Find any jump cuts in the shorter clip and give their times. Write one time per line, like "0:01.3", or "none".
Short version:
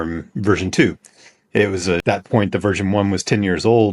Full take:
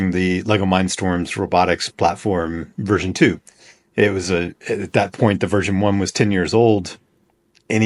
0:02.0